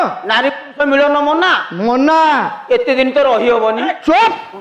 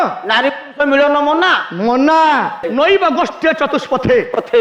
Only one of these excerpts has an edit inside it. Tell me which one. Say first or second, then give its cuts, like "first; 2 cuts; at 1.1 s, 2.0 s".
second; 1 cut; at 2.6 s